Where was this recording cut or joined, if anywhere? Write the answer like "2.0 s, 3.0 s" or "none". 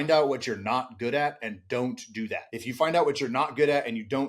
2.5 s